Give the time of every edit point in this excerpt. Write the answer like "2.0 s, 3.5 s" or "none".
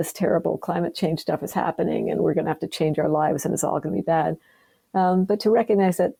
none